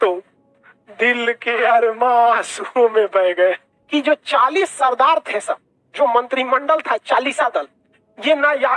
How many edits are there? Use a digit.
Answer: 1